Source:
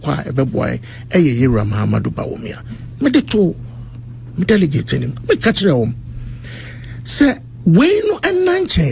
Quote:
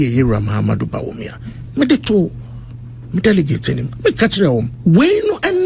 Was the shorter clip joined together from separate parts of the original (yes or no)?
yes